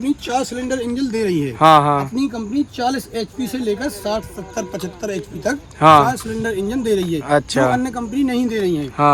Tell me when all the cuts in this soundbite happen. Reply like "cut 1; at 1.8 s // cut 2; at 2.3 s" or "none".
none